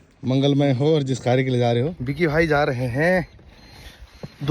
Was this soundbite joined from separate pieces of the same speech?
yes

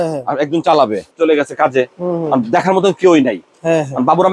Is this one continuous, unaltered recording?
no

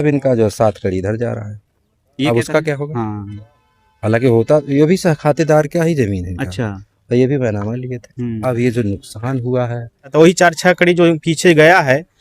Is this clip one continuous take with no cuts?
no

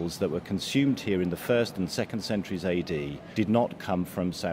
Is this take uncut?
no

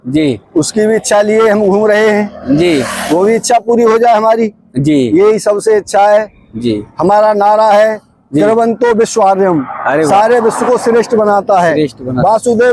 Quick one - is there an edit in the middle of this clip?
no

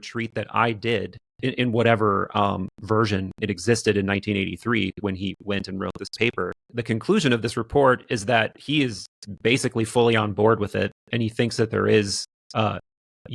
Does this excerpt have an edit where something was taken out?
yes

